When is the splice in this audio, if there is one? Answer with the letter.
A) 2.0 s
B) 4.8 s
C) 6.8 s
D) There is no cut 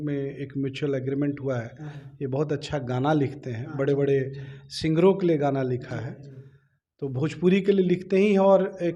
D